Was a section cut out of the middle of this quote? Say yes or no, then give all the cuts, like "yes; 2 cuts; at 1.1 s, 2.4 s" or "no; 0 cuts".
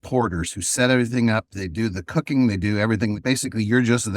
yes; 2 cuts; at 1.6 s, 3.2 s